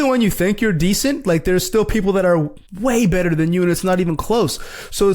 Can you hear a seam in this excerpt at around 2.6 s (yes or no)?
yes